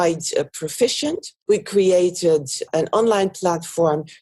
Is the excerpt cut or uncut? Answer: cut